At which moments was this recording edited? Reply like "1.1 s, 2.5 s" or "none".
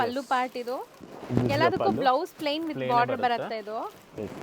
none